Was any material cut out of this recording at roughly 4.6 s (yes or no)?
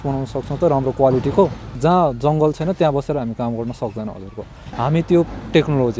yes